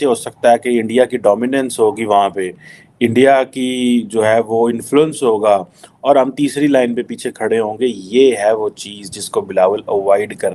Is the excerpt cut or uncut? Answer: uncut